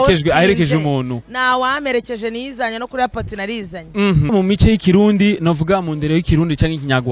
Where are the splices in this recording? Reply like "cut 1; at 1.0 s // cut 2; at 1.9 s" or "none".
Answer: cut 1; at 4.3 s